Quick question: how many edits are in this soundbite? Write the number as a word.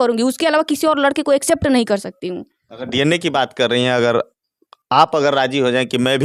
zero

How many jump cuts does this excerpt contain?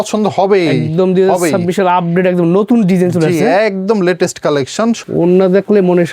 one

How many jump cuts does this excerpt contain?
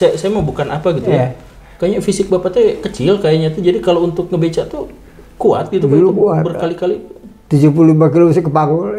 zero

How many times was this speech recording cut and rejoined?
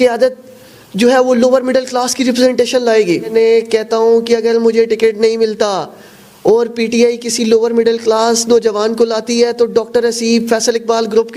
one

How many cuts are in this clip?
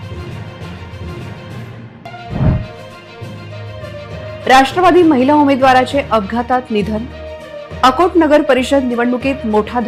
zero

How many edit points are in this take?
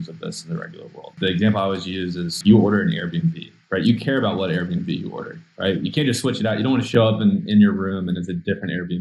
three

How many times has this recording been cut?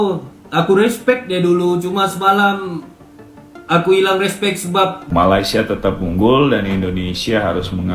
one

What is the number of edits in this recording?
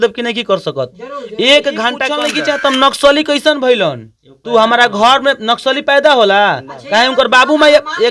one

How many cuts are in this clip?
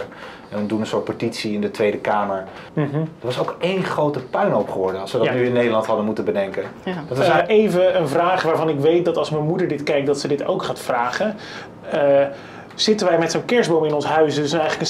two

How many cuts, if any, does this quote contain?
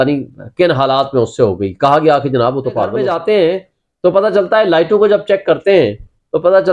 one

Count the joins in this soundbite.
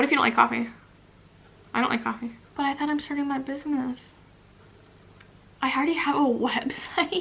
one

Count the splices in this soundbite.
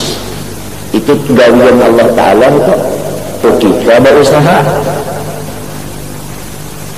one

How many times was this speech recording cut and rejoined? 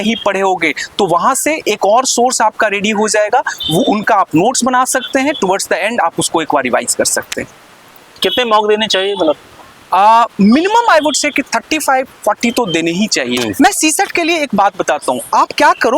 zero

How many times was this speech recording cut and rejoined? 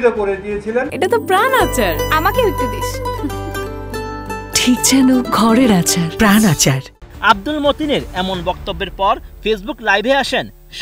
zero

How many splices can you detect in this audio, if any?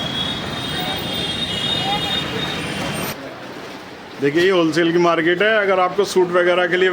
one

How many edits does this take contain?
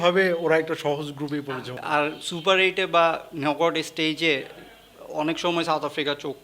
zero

